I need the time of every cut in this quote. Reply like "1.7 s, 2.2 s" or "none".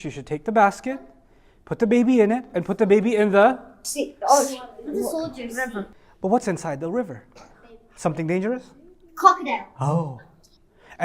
6.0 s